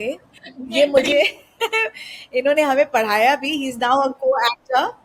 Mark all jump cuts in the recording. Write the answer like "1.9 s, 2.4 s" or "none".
none